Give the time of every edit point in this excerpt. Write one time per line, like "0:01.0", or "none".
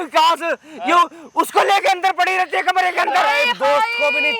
none